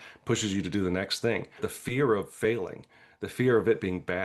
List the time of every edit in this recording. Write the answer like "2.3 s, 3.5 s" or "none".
1.7 s